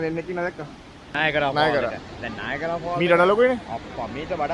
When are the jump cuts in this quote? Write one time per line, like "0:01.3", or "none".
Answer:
0:01.1